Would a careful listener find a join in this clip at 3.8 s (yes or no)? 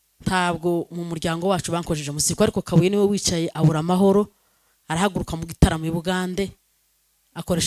no